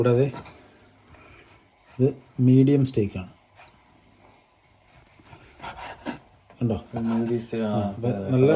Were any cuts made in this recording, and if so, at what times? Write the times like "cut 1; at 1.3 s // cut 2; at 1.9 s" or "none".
none